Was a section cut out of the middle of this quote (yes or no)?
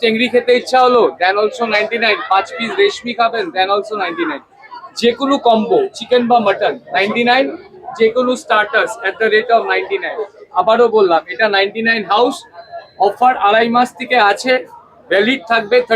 no